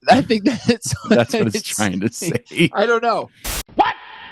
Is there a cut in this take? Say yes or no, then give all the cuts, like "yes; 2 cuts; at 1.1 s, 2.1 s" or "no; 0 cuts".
no; 0 cuts